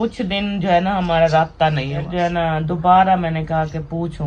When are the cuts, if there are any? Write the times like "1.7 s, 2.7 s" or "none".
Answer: 2.0 s